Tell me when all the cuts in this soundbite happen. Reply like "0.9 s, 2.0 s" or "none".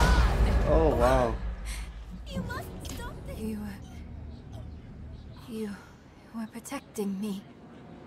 3.1 s